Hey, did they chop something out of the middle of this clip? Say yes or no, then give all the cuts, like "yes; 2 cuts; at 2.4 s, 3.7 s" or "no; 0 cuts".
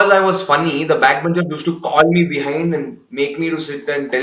no; 0 cuts